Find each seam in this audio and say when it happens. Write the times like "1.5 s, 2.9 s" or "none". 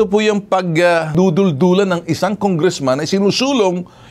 1.1 s